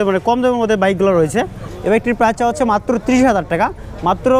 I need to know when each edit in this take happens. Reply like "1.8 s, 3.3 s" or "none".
1.7 s